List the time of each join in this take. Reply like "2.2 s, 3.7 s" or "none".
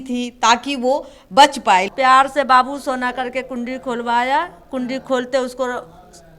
1.9 s